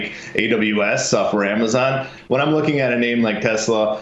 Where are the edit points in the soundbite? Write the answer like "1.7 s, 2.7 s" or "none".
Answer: 2.1 s